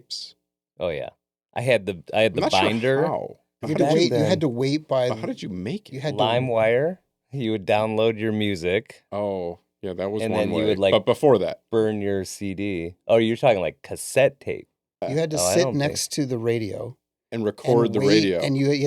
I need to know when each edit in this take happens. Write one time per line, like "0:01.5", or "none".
0:03.6
0:15.0